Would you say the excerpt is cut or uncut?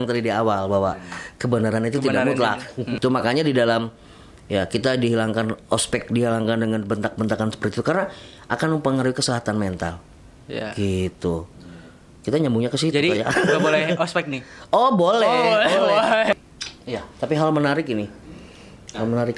cut